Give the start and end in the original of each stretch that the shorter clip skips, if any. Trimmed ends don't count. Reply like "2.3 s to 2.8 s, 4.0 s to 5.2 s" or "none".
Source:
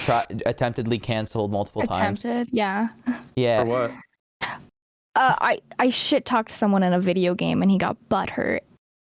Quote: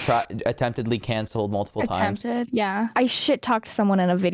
2.9 s to 5.7 s

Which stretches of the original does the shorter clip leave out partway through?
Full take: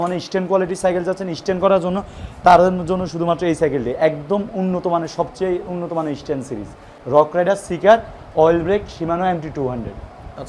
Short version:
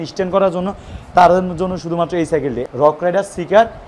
3.9 s to 6.9 s

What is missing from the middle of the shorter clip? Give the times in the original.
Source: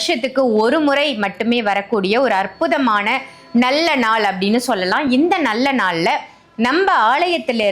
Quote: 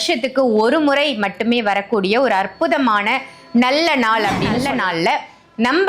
4.5 s to 5.5 s

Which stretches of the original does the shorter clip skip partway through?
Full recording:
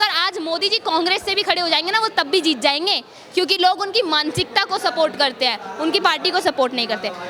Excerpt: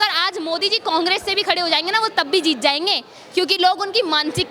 none

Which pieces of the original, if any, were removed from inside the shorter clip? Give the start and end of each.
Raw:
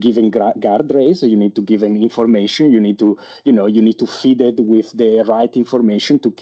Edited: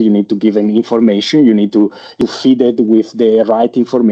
3.4 s to 4.0 s

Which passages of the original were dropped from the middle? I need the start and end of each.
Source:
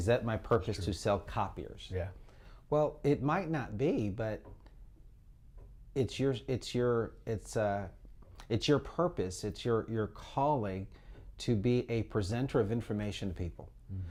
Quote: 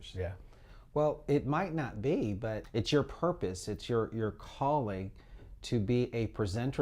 4.4 s to 8.4 s

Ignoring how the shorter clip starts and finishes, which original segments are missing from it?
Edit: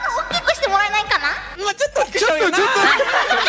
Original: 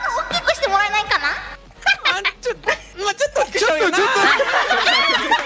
1.5 s to 2.9 s

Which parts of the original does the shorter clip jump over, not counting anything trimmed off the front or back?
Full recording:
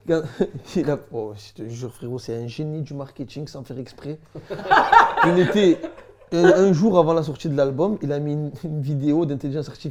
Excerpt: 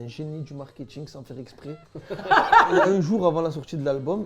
5.1 s to 6.4 s

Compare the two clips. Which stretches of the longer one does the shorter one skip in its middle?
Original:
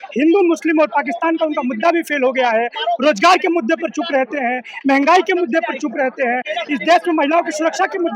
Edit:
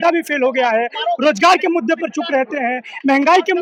none

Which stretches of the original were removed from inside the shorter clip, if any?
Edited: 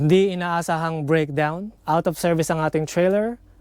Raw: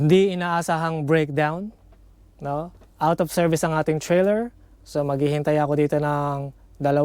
1.7 s to 2.8 s

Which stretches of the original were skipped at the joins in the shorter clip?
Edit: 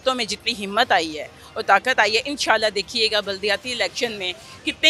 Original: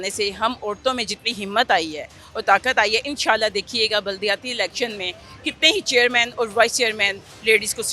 none

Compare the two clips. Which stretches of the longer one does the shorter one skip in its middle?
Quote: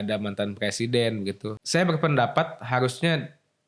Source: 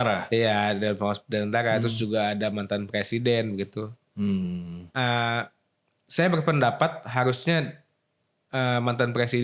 3.8 s to 6.0 s

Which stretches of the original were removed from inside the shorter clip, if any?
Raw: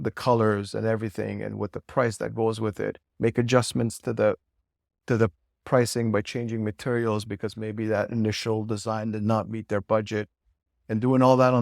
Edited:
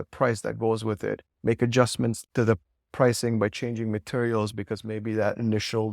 4.0 s to 4.9 s

